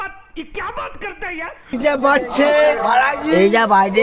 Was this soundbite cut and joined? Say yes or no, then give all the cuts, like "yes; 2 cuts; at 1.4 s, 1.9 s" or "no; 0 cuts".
no; 0 cuts